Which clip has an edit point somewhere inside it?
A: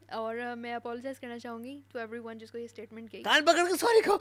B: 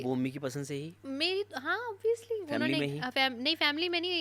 B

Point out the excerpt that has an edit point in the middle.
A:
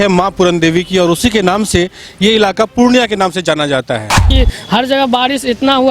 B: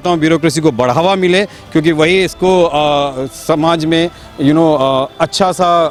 A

